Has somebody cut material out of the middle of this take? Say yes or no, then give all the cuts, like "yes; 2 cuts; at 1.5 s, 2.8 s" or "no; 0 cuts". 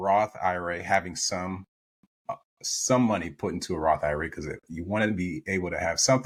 no; 0 cuts